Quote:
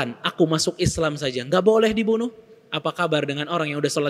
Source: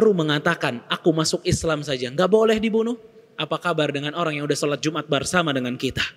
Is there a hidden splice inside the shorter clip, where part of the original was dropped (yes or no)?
no